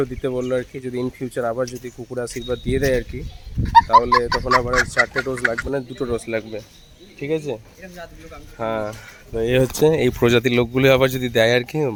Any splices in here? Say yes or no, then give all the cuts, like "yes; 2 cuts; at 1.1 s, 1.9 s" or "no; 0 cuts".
no; 0 cuts